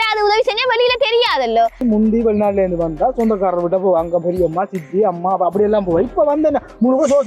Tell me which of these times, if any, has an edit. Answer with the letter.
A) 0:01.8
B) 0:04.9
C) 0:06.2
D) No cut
A